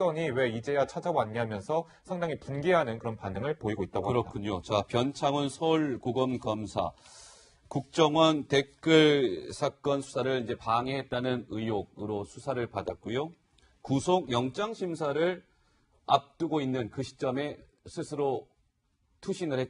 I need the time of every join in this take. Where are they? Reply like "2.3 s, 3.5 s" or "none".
12.0 s